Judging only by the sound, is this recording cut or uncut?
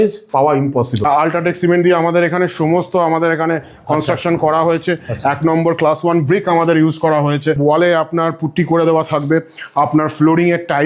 cut